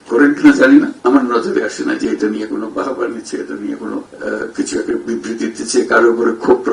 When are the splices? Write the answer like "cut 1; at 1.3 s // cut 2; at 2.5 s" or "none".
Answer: cut 1; at 0.9 s // cut 2; at 4.1 s